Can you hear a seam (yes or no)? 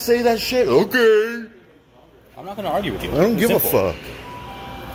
no